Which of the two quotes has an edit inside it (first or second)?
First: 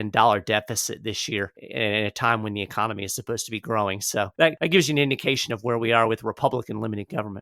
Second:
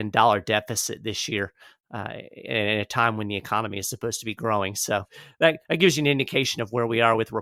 first